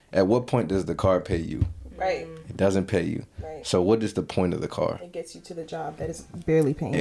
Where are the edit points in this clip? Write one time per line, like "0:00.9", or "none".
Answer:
none